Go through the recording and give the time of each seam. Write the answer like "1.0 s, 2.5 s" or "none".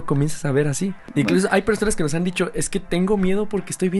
1.0 s